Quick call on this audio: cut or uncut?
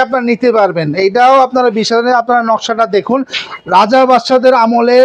uncut